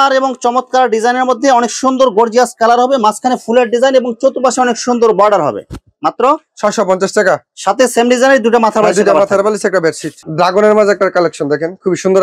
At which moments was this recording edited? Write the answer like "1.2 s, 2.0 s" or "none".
none